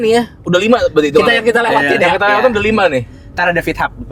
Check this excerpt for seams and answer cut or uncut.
uncut